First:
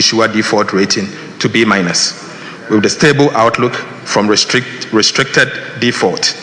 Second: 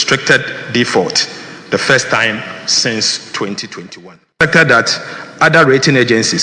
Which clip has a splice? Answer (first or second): second